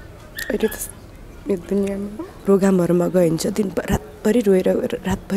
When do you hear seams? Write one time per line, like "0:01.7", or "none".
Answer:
0:02.3